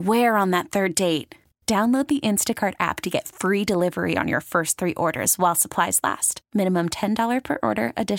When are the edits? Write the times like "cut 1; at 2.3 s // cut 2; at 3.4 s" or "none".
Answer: none